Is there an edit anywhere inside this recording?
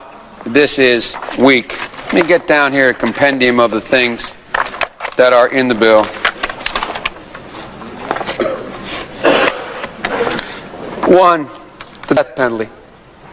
yes; 1 cut; at 12.2 s

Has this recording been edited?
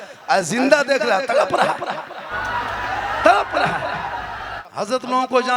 yes; 1 cut; at 4.6 s

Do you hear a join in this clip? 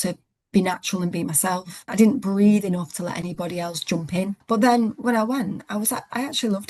yes; 2 cuts; at 1.8 s, 4.4 s

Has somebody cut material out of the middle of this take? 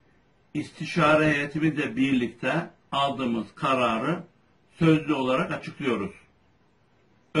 yes; 1 cut; at 2.6 s

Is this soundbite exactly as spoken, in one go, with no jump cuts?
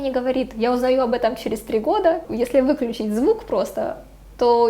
no; 1 cut; at 2.2 s

